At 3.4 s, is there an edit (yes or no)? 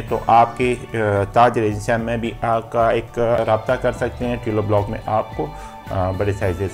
yes